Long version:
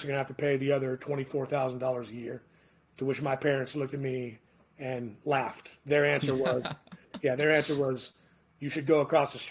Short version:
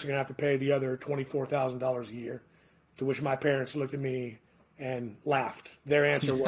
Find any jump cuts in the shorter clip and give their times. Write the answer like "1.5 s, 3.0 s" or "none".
none